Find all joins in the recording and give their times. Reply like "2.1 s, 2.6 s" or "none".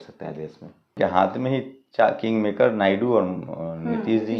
1.0 s

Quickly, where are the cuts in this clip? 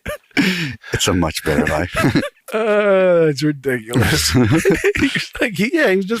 2.4 s

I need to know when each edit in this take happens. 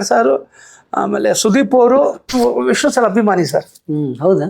2.3 s

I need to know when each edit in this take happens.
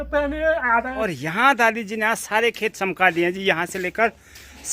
1.0 s

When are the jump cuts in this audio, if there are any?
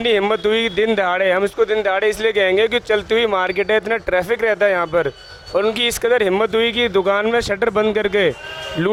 none

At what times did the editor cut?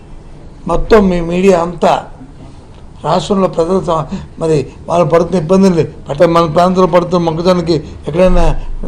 6.0 s

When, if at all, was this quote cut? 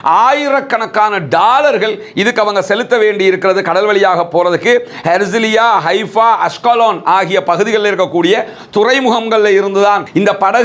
none

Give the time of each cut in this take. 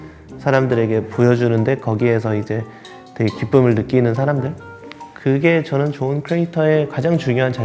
none

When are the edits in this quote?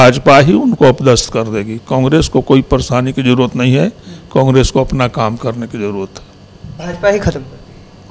none

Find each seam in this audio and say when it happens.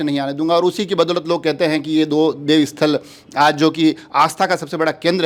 none

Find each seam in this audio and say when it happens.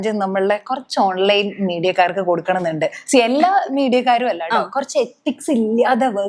none

